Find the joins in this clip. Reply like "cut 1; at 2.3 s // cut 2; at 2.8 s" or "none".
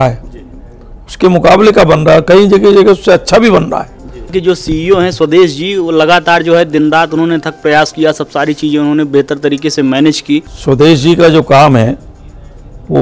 cut 1; at 4.3 s // cut 2; at 10.5 s